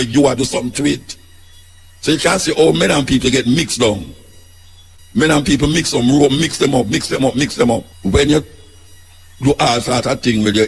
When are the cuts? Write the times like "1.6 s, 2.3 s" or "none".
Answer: 7.9 s